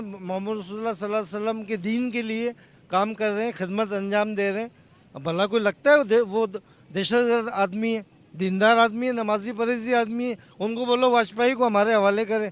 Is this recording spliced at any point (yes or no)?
no